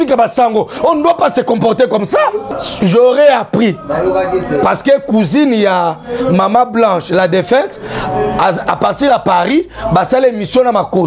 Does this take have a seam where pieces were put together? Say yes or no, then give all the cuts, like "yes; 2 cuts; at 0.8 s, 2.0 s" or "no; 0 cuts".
yes; 1 cut; at 2.5 s